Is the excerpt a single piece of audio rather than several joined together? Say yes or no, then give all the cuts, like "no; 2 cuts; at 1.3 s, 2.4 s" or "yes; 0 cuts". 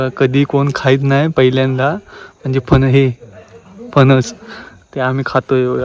yes; 0 cuts